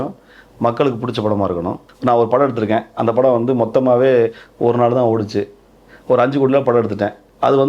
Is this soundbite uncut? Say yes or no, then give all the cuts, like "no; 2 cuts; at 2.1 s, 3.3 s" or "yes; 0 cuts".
no; 1 cut; at 1.9 s